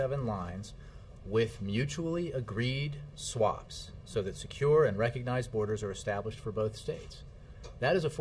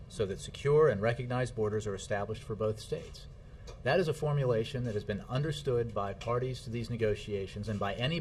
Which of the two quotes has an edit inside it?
first; 1 cut; at 2.1 s

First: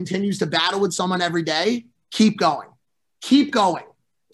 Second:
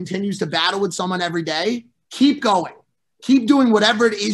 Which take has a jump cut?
second; 1 cut; at 2.0 s

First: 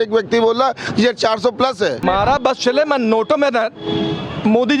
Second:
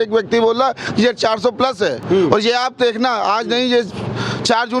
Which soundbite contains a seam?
first; 1 cut; at 2.0 s

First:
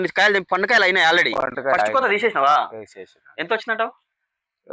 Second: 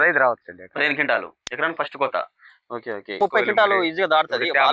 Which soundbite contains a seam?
second; 1 cut; at 3.2 s

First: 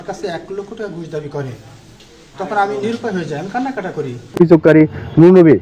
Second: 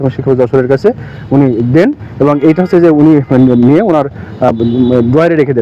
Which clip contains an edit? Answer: first; 1 cut; at 4.4 s

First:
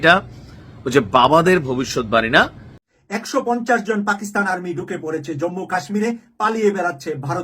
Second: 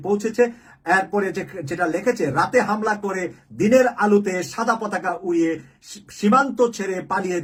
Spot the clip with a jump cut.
first; 1 cut; at 2.8 s

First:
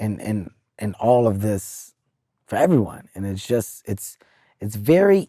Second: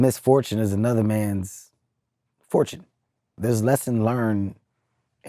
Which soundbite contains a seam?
second; 1 cut; at 3.3 s

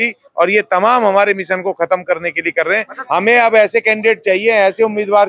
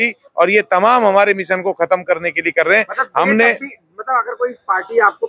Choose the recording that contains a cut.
first; 1 cut; at 2.9 s

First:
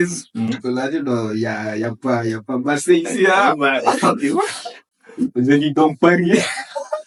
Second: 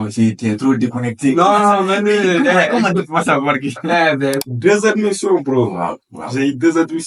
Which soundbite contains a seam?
second; 1 cut; at 4.4 s

